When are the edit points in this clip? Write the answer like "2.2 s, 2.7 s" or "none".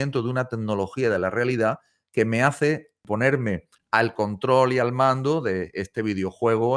3.0 s, 3.7 s